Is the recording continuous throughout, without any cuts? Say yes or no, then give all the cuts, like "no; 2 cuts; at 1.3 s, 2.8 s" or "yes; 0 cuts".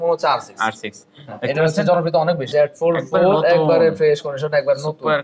no; 1 cut; at 2.4 s